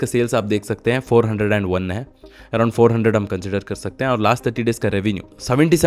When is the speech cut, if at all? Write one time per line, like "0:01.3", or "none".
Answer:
none